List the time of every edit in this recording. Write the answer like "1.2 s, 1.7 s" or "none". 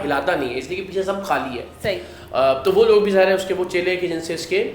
none